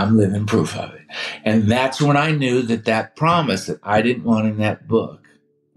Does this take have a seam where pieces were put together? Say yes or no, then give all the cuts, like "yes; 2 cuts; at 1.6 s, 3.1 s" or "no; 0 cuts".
no; 0 cuts